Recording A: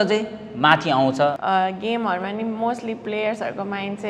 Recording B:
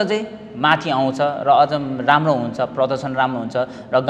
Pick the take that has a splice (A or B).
A